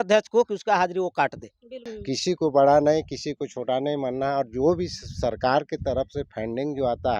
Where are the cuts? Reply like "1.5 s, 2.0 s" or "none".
1.9 s